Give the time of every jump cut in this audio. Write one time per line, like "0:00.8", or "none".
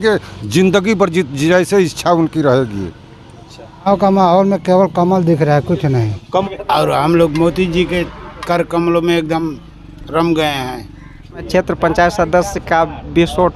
0:03.9
0:06.4
0:11.5